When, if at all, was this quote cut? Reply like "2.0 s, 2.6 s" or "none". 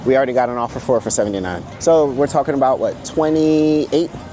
1.6 s